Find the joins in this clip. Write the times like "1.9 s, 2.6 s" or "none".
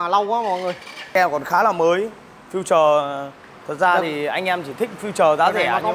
1.1 s

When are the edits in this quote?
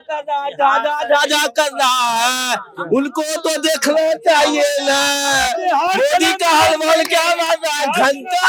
none

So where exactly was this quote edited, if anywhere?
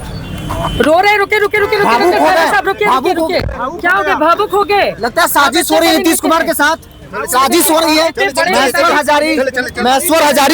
none

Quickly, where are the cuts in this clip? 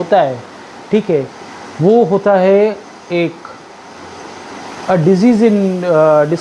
none

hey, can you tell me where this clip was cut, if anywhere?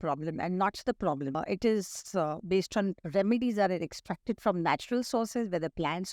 1.4 s

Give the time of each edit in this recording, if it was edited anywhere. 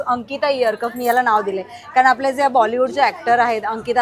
none

